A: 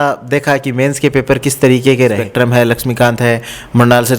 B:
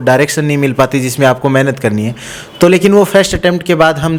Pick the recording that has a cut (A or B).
A